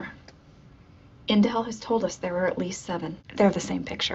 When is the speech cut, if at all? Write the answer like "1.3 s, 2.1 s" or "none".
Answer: 3.2 s